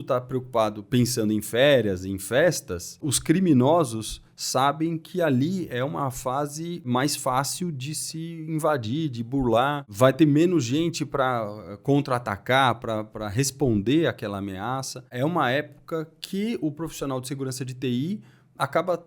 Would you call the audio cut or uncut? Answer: cut